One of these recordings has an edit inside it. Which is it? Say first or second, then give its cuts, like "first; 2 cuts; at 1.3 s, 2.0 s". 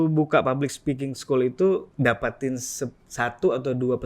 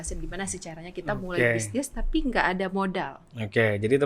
first; 1 cut; at 1.9 s